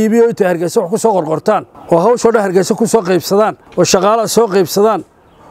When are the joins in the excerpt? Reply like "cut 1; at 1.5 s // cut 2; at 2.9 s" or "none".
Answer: cut 1; at 1.7 s // cut 2; at 3.6 s